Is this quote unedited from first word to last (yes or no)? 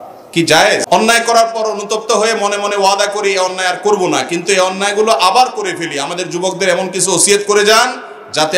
no